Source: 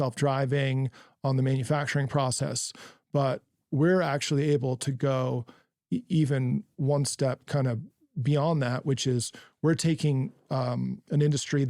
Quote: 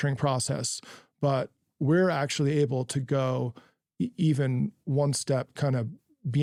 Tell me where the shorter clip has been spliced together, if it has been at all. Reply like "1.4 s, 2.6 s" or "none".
none